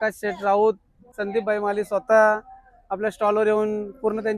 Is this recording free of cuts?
no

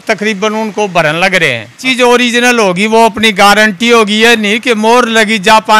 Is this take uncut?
no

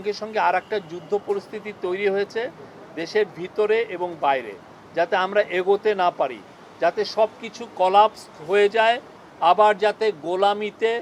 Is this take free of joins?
yes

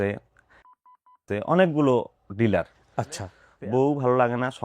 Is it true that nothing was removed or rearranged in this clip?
no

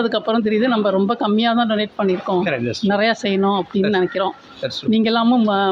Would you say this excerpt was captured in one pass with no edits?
yes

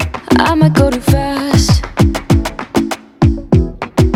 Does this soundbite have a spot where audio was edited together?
no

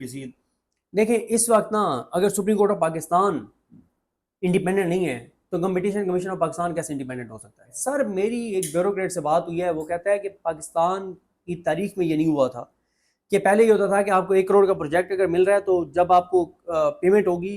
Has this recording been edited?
yes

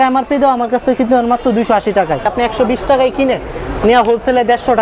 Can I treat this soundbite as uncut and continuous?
no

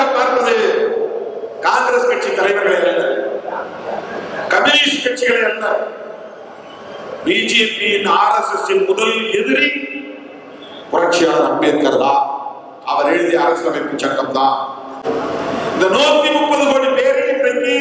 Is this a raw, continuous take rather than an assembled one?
no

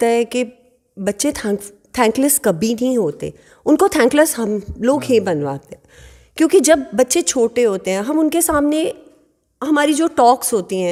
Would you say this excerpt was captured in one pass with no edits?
yes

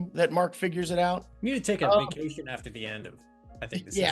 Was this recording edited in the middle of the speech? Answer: yes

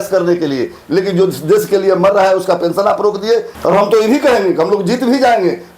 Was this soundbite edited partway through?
yes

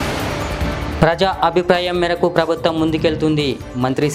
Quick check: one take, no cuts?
yes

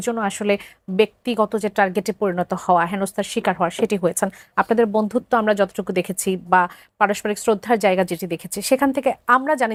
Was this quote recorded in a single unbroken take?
yes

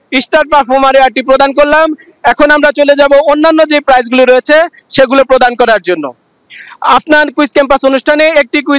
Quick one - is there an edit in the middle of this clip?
no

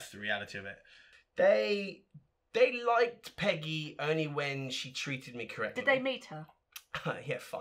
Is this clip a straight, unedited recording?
no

